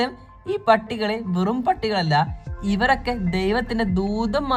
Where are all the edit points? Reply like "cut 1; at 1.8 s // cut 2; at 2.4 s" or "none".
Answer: none